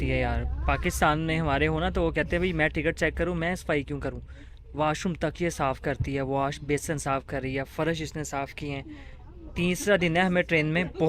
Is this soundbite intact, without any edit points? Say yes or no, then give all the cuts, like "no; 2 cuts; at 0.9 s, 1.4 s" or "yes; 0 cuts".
yes; 0 cuts